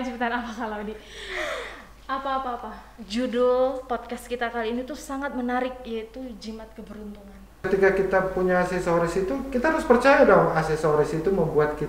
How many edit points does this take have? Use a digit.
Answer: 1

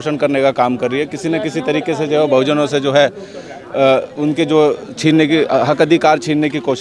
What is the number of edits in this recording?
0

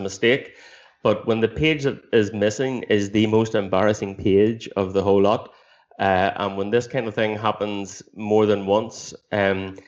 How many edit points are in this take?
0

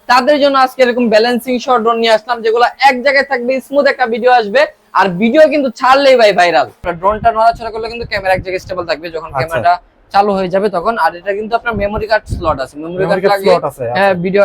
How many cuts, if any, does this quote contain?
1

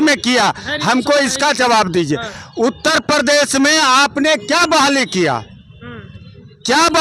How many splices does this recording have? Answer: 0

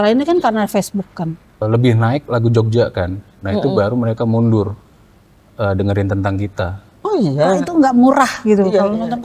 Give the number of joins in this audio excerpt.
2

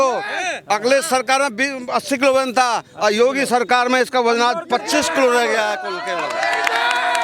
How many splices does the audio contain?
0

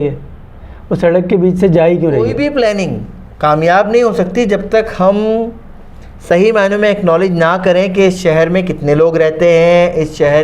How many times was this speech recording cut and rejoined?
1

